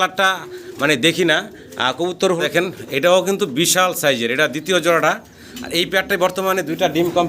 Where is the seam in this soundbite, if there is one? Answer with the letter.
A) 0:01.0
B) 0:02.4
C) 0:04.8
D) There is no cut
B